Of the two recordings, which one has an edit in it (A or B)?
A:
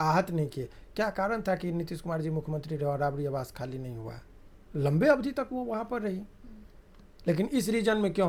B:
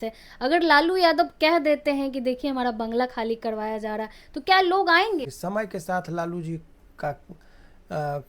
B